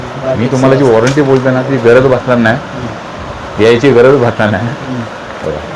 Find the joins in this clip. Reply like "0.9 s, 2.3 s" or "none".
none